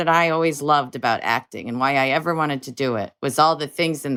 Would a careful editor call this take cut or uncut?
uncut